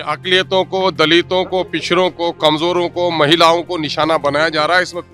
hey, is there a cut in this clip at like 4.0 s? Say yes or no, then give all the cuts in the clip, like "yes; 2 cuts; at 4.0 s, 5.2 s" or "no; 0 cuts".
no; 0 cuts